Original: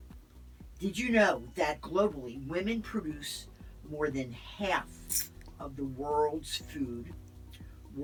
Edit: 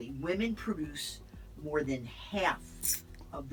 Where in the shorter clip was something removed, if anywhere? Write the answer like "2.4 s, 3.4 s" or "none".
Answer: none

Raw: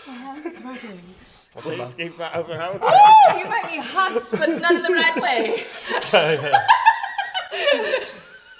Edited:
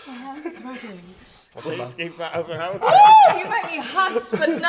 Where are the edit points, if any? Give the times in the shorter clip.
none

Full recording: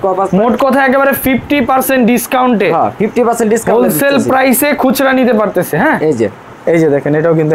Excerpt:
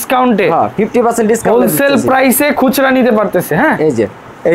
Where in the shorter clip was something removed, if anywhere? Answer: none

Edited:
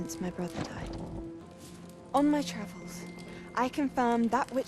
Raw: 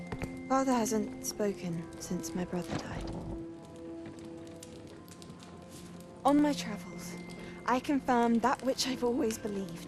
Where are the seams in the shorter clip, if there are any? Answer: 1.5 s

